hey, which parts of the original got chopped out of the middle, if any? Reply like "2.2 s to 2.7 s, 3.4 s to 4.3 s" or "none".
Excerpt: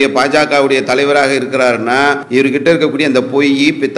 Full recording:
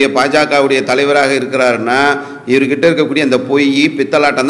2.2 s to 2.4 s